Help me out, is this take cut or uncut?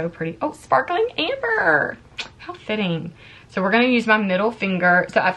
uncut